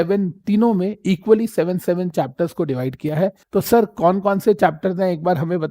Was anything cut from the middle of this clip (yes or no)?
yes